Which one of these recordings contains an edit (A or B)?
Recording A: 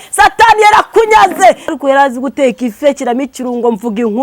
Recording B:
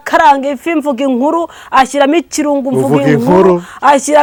A